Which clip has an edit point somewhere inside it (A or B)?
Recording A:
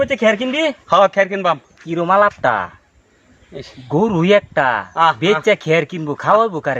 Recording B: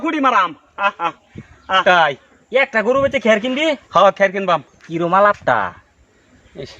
B